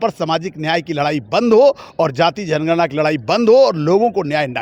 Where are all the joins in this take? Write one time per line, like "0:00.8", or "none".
none